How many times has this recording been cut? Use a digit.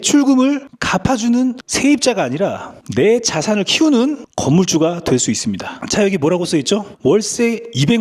1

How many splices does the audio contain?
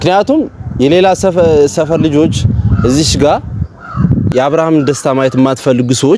1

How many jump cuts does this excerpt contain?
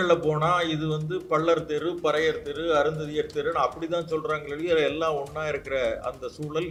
0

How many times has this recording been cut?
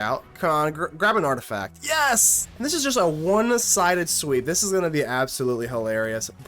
1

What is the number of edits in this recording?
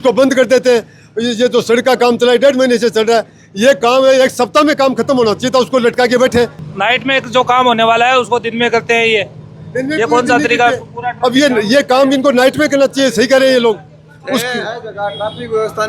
0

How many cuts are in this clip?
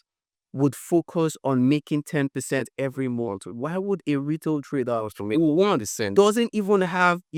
0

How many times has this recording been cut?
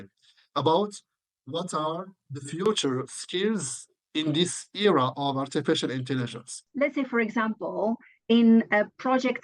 1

